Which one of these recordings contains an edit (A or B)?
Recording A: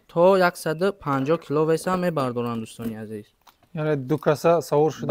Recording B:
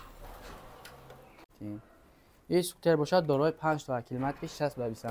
B